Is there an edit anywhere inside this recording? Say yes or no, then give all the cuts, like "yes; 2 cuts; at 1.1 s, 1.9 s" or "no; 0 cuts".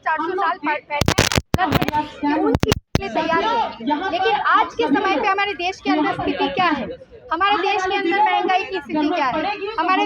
yes; 2 cuts; at 1.5 s, 2.8 s